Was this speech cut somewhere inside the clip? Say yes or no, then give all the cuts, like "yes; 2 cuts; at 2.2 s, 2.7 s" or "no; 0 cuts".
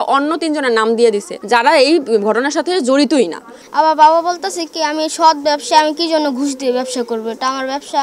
yes; 2 cuts; at 1.3 s, 3.6 s